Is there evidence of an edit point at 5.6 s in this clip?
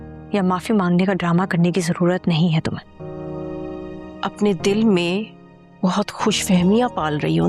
no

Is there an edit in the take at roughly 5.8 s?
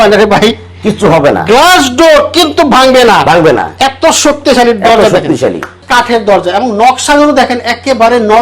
yes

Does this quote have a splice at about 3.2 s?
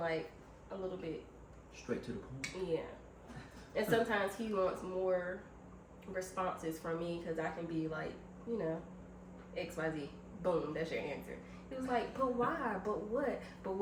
no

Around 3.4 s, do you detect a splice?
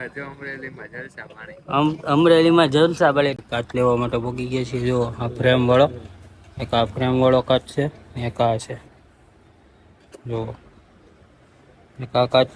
yes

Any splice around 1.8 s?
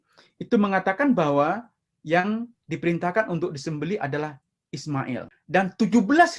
no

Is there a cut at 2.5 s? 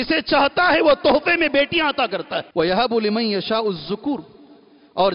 yes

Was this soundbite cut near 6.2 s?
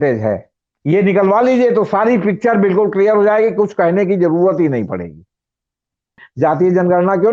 yes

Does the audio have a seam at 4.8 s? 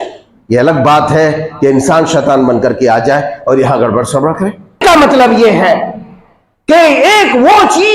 yes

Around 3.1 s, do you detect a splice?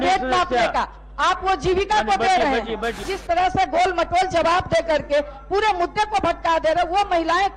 yes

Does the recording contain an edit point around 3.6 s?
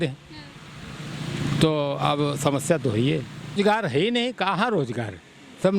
yes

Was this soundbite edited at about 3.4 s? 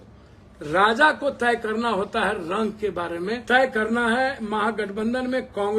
yes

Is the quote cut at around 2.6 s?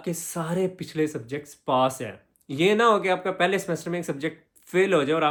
no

